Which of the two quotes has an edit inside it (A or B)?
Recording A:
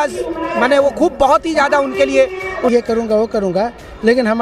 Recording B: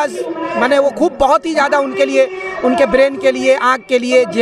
A